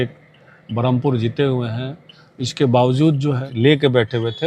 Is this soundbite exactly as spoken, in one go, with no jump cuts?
no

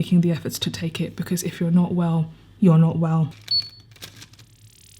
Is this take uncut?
no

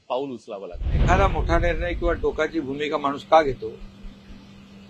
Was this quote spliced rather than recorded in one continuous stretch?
yes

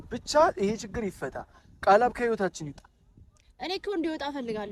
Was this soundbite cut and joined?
no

